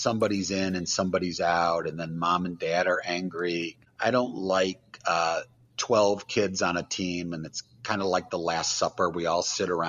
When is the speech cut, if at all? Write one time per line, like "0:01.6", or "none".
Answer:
0:03.8

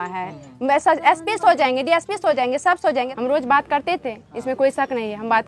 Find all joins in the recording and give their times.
0:03.1

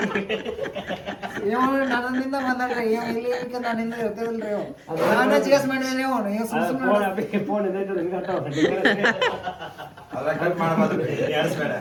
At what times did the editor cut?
none

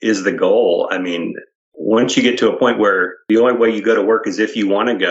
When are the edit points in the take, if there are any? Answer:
0:01.7
0:03.2

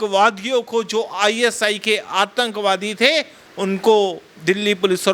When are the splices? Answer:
none

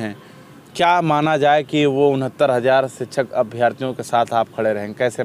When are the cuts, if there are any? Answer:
none

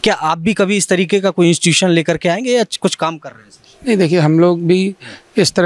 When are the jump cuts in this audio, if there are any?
none

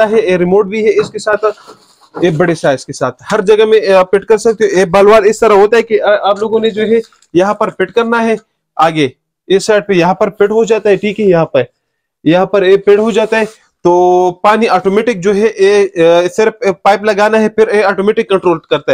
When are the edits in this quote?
none

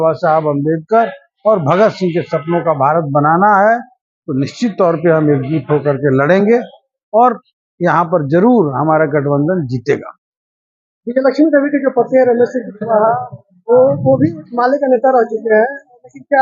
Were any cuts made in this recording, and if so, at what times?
none

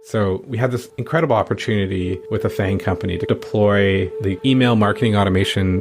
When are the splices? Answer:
0:00.9
0:02.2

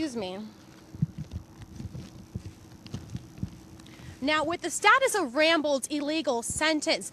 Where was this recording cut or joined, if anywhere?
0:04.4

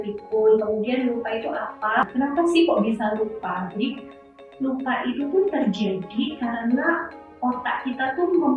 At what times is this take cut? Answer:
0:02.1

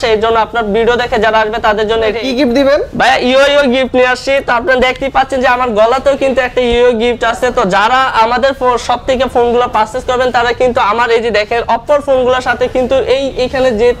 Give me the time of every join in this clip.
0:02.2

